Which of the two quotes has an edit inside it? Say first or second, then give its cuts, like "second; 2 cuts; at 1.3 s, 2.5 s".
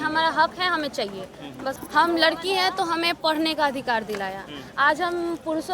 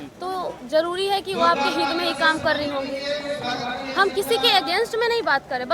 first; 1 cut; at 1.8 s